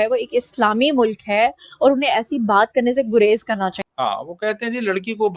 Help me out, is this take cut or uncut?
cut